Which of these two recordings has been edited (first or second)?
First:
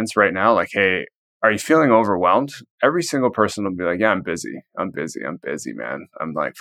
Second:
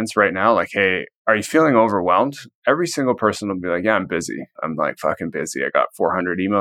second